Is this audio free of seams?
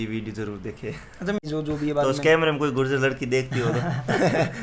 no; 1 cut; at 1.4 s

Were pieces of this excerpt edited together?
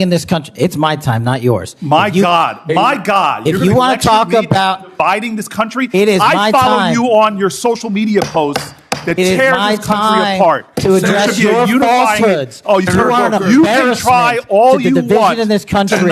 no; 0 cuts

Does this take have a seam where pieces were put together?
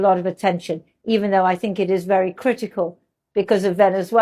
no; 0 cuts

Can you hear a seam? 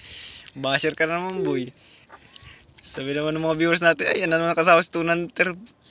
no; 0 cuts

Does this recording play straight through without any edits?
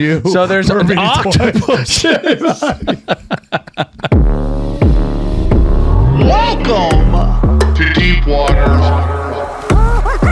no; 1 cut; at 4.1 s

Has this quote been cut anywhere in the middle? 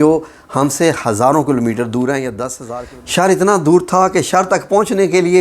yes; 1 cut; at 2.6 s

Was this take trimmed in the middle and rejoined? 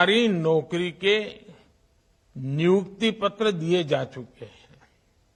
no; 0 cuts

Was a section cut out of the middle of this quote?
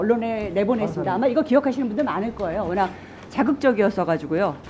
no; 0 cuts

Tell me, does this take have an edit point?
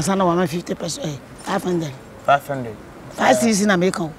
no; 0 cuts

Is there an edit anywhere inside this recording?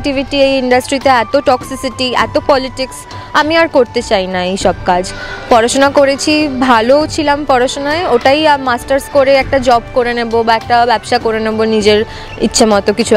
no; 0 cuts

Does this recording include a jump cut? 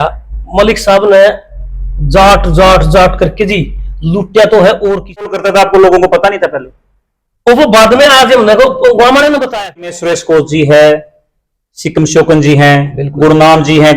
yes; 2 cuts; at 5.3 s, 10.1 s

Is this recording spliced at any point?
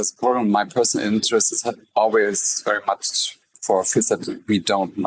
no; 0 cuts

